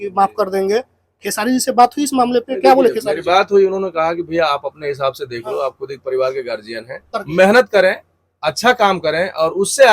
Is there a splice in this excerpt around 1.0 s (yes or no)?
no